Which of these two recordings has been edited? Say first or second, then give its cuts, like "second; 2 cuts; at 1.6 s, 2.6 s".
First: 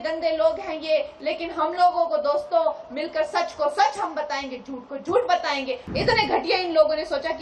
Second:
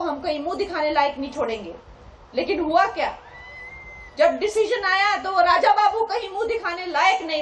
first; 1 cut; at 5.8 s